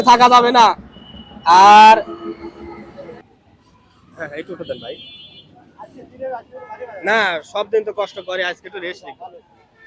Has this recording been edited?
yes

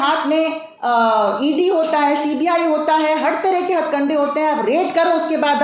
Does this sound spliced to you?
no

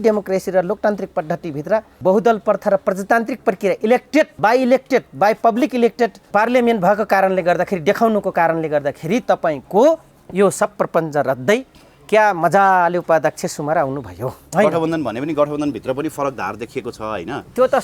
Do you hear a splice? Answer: yes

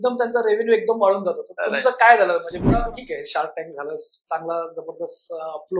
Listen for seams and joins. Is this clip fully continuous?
no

